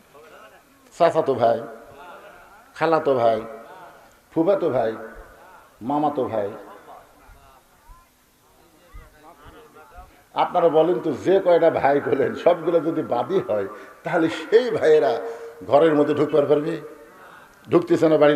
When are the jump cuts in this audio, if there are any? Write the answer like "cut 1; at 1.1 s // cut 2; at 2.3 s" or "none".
none